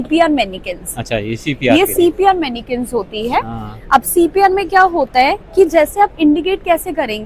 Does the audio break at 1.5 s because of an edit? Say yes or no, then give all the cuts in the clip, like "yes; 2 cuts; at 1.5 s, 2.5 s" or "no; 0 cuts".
no; 0 cuts